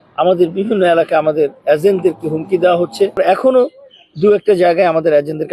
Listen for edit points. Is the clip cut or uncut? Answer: cut